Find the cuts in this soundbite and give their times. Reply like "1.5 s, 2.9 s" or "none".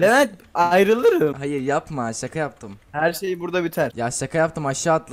1.4 s, 3.9 s